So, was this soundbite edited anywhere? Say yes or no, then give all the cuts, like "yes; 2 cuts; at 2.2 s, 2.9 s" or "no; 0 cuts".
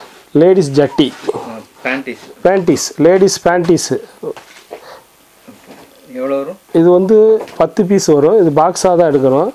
no; 0 cuts